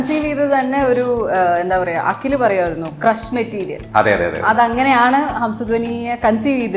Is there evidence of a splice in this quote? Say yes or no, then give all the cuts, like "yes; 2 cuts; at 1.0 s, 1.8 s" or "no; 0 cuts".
no; 0 cuts